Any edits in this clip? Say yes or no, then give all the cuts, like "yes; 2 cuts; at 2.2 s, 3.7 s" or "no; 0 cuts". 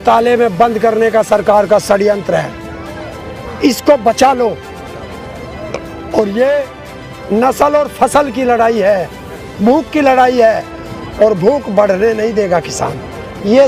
no; 0 cuts